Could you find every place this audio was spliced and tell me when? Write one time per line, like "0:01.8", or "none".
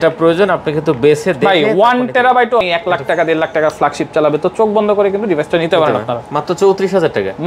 0:02.6